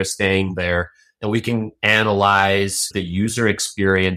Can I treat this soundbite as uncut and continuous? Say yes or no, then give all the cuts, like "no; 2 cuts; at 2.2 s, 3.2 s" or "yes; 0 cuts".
no; 1 cut; at 2.9 s